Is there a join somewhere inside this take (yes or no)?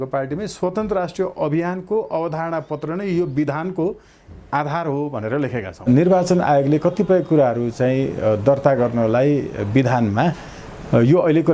yes